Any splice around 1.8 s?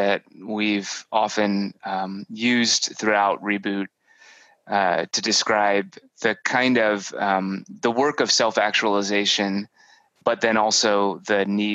no; 0 cuts

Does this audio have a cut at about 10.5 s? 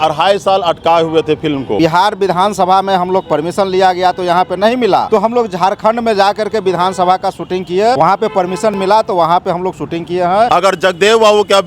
yes; 4 cuts; at 1.7 s, 5.1 s, 8.0 s, 10.5 s

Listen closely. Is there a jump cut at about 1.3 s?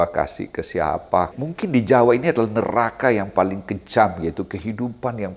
yes; 1 cut; at 1.3 s

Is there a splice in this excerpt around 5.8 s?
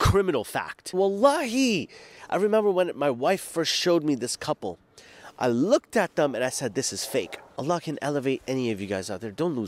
no; 2 cuts; at 0.9 s, 7.4 s

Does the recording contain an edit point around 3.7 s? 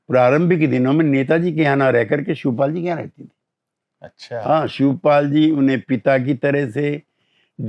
no; 0 cuts

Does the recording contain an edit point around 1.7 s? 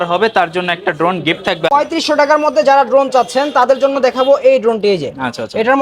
yes; 1 cut; at 1.7 s

